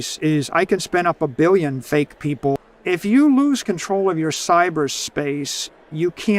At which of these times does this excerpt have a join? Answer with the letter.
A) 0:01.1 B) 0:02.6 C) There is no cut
B